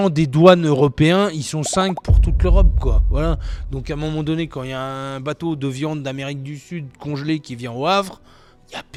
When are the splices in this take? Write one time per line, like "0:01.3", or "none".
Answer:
none